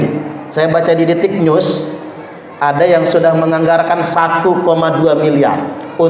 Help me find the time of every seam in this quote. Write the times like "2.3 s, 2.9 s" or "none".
none